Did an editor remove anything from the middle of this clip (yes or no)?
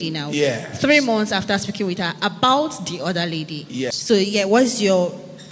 yes